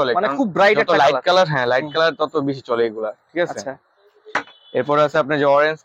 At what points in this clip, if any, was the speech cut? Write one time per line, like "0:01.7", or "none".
none

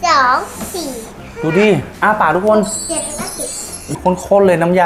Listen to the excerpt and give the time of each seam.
0:03.9

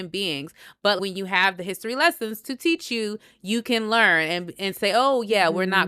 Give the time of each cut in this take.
0:01.0

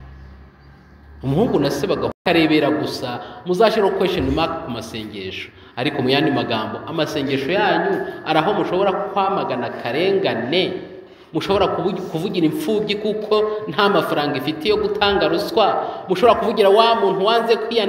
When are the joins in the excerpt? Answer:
0:02.2

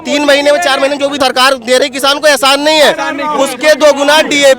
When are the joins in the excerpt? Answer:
0:01.2

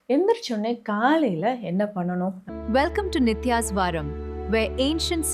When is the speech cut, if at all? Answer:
0:02.4

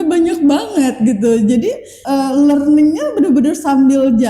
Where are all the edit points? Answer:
0:01.9

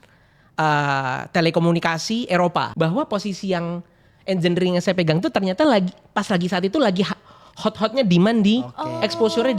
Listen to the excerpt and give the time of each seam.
0:02.7

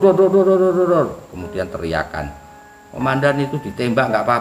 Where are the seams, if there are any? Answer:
none

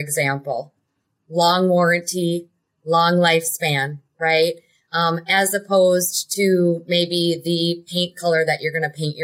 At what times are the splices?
none

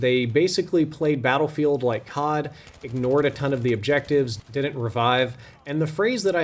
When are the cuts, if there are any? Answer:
0:04.3

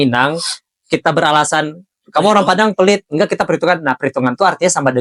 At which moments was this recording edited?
none

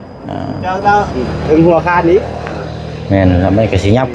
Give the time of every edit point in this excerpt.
0:01.1

